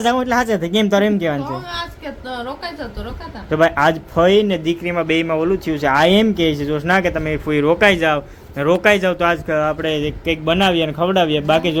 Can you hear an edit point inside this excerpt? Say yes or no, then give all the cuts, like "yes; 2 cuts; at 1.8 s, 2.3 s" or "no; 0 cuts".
no; 0 cuts